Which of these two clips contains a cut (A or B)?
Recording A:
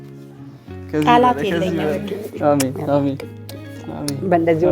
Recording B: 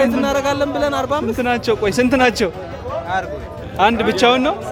A